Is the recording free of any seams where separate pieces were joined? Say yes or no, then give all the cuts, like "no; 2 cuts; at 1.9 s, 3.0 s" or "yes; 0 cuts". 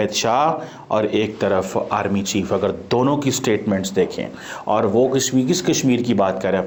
yes; 0 cuts